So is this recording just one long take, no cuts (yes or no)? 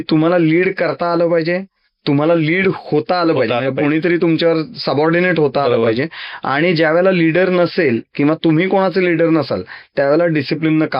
yes